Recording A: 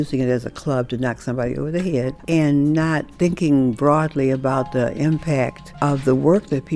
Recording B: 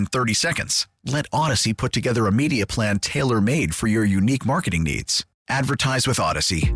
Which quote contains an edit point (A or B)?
A